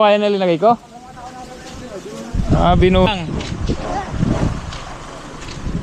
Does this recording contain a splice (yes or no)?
yes